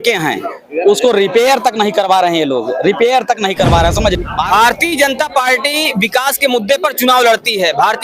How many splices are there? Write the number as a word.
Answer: one